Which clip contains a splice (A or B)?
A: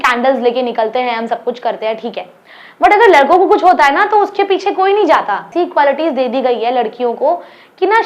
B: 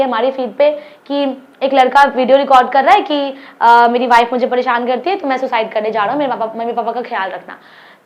A